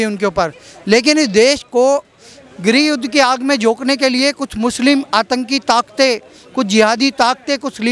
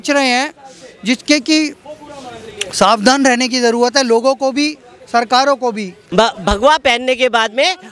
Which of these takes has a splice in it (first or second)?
second